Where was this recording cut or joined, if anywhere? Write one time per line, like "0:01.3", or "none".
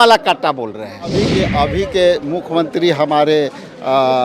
0:01.1